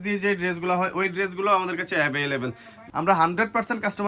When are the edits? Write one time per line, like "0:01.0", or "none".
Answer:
0:02.7

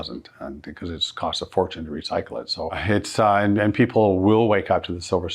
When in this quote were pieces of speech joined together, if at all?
0:02.8

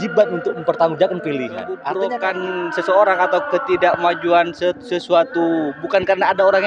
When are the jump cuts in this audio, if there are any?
0:01.9

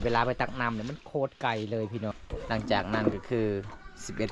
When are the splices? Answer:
0:02.2

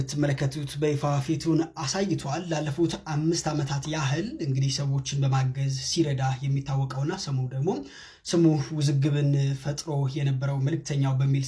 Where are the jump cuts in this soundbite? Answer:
none

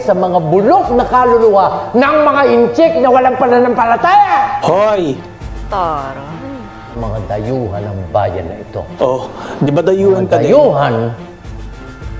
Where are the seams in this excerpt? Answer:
0:07.0

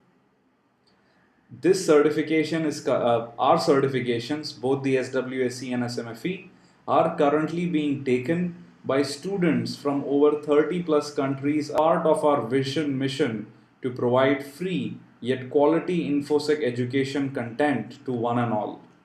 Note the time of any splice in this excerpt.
0:09.7

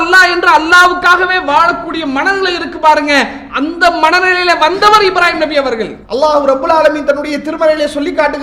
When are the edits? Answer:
0:06.0

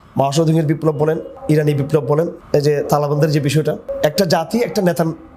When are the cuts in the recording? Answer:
0:01.3
0:02.4
0:03.9

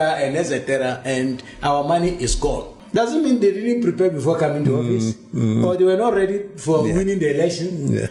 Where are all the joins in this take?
0:02.7

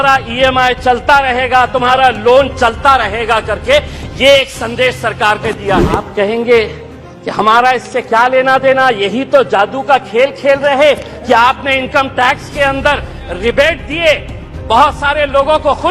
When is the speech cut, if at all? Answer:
0:06.1

